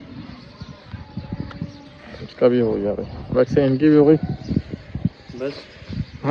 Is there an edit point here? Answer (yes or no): no